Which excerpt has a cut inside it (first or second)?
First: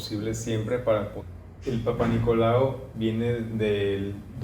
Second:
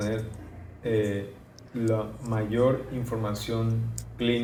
first